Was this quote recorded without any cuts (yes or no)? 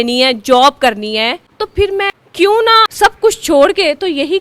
no